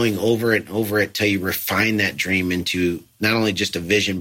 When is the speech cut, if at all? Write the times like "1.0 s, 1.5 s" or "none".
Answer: 3.1 s

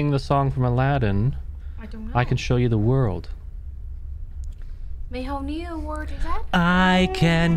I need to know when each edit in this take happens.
none

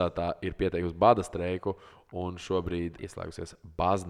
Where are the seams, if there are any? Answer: 3.0 s

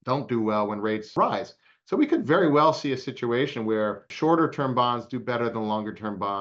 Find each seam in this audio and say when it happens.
1.1 s, 4.1 s

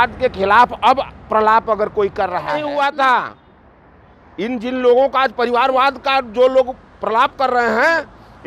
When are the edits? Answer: 2.6 s

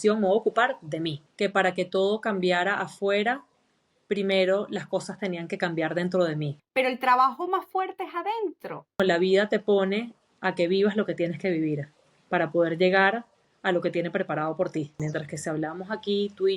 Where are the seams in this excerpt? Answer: 1.2 s, 6.6 s, 9.0 s, 15.0 s

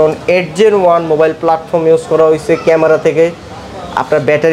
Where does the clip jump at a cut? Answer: none

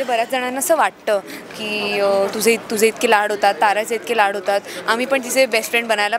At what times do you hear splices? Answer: none

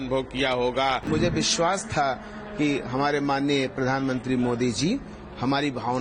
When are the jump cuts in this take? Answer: 1.1 s

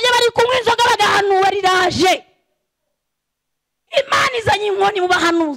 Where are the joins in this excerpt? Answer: none

